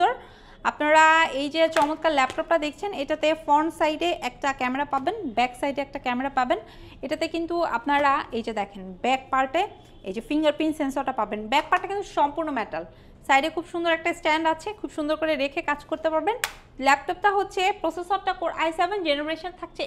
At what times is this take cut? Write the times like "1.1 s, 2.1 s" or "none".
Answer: none

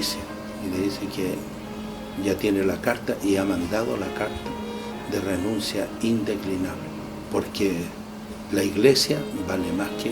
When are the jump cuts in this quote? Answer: 6.8 s

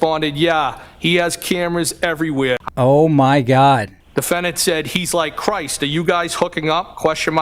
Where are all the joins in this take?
2.7 s, 4.0 s

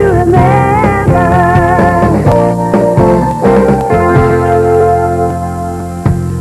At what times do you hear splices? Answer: 4.2 s

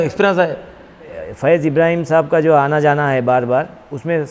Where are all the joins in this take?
1.2 s

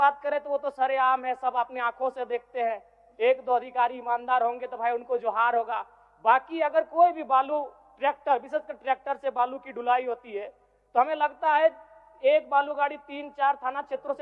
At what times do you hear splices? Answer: none

